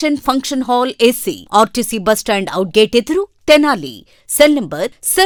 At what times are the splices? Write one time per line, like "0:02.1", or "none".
none